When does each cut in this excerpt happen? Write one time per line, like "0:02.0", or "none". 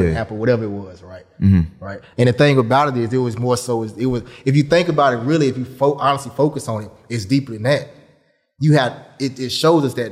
none